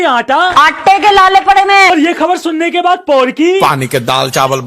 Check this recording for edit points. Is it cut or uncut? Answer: cut